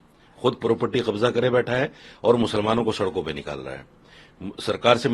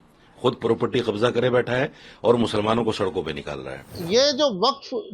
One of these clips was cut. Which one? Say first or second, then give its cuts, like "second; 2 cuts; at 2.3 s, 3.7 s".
second; 1 cut; at 4.0 s